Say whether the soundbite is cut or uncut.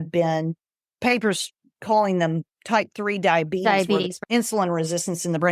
cut